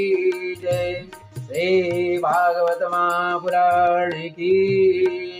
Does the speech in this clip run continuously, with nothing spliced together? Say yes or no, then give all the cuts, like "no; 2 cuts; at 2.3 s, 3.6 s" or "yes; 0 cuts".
yes; 0 cuts